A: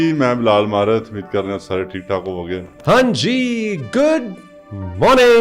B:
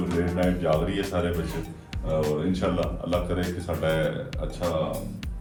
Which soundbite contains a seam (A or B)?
A